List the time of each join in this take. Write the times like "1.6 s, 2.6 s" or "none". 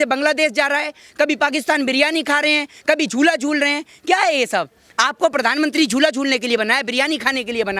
none